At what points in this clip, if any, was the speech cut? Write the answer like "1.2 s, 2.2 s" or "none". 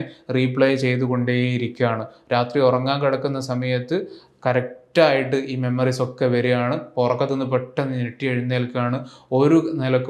none